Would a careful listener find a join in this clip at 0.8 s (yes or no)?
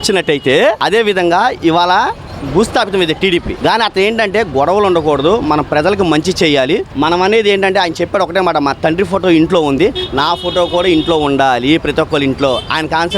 yes